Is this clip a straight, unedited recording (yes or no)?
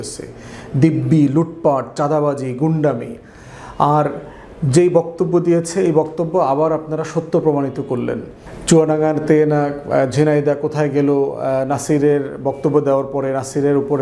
yes